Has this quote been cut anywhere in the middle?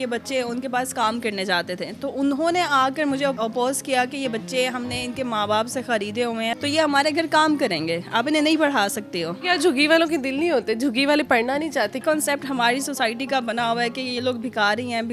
yes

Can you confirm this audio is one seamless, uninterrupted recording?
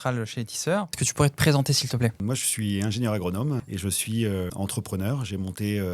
no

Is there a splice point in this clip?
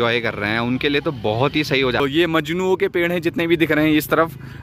yes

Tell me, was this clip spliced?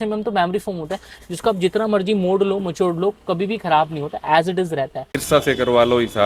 yes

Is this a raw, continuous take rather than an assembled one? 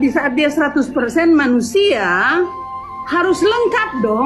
yes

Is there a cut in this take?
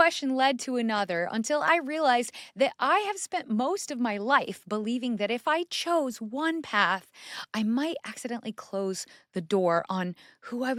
no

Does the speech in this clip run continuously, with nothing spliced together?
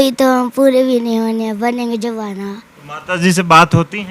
no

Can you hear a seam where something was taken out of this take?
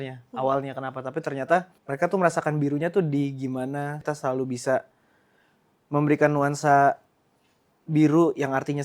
yes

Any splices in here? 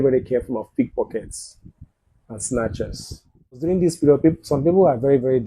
yes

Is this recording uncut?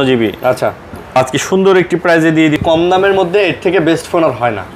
no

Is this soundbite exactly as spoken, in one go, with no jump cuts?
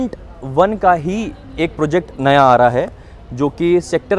yes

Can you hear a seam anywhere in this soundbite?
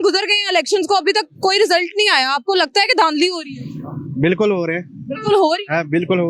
no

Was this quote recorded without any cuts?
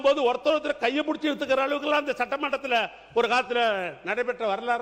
yes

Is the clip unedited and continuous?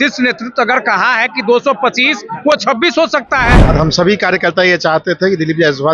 no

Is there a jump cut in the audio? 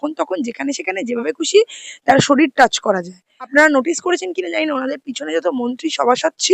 yes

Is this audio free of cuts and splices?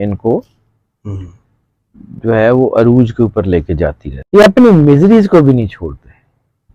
no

